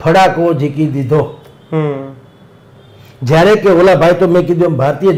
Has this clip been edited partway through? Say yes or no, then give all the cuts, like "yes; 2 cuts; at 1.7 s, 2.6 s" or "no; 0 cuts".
no; 0 cuts